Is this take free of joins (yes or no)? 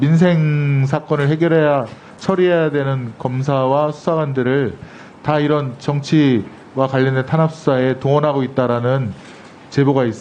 yes